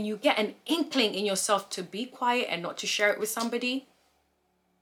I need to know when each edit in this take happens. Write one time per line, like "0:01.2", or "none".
none